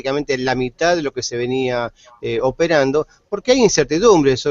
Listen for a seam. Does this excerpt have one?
yes; 1 cut; at 2.9 s

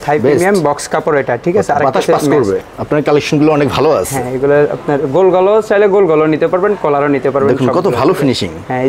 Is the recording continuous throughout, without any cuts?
no; 1 cut; at 2.7 s

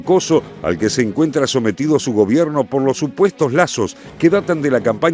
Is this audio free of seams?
yes; 0 cuts

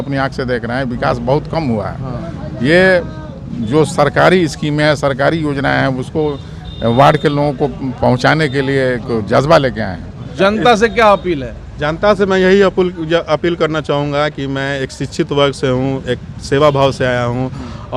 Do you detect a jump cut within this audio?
yes; 1 cut; at 10.2 s

